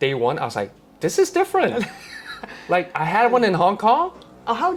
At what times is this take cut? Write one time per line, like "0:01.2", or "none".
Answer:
none